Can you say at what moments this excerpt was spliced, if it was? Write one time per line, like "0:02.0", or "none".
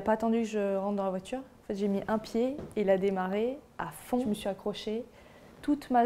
0:04.2